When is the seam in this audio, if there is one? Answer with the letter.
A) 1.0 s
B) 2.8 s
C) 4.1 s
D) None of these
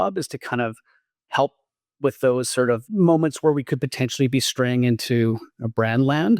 B